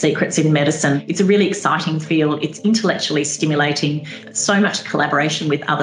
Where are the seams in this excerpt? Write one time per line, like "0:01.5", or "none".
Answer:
0:01.0
0:04.3